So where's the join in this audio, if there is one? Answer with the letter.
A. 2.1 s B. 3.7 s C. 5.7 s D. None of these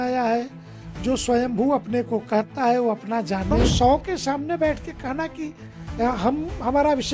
B